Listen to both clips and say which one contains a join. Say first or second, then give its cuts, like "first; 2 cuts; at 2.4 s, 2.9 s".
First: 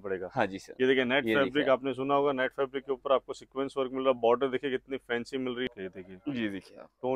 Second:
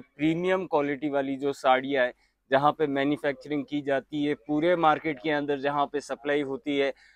first; 1 cut; at 5.6 s